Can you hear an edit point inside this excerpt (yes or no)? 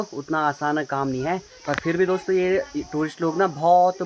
no